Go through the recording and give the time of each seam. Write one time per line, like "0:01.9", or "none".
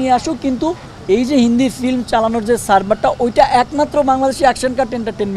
none